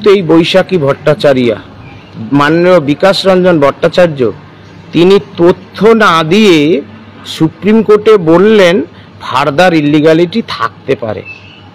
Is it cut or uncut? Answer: uncut